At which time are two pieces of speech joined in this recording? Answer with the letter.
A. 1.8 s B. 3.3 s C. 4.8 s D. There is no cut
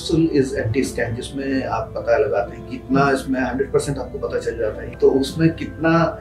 C